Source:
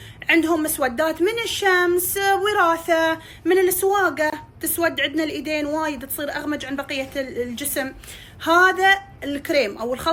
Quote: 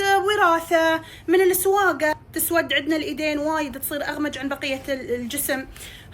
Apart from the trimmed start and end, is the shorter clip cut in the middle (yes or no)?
yes